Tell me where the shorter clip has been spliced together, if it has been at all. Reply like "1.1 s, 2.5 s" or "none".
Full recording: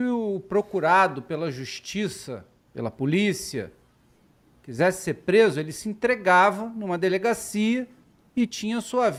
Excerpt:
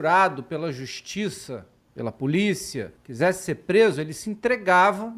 3.0 s